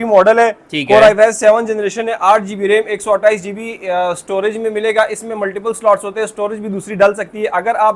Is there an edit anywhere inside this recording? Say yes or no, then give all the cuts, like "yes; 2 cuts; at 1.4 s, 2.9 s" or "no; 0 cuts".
no; 0 cuts